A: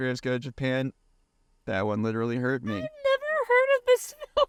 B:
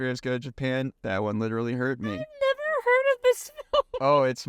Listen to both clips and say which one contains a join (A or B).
B